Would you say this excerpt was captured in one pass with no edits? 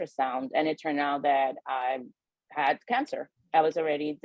no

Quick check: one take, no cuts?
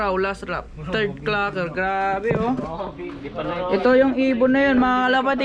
yes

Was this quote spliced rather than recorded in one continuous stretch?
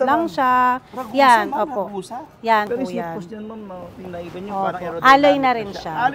yes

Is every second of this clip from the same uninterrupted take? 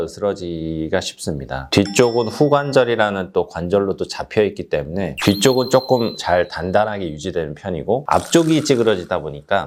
yes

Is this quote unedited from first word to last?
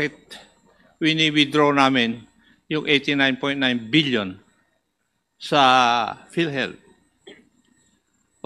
yes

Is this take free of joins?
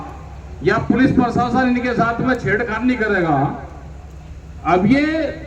yes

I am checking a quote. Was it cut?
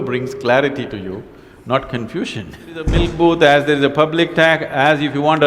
yes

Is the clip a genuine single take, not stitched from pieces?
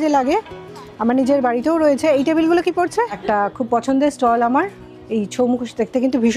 no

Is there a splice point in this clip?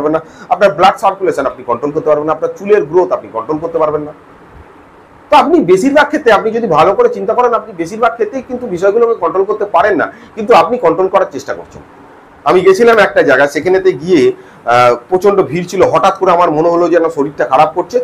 yes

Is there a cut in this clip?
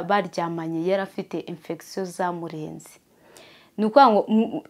no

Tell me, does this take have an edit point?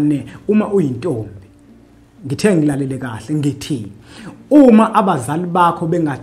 no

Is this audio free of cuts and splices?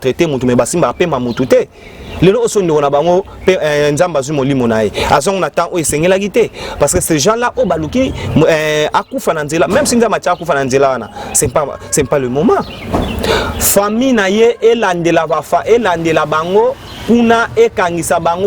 yes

